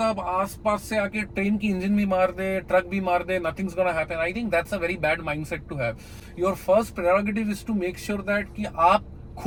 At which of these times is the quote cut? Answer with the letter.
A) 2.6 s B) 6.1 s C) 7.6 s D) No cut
D